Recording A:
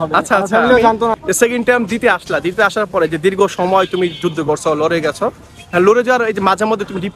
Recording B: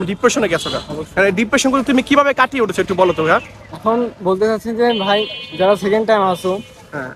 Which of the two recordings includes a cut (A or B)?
A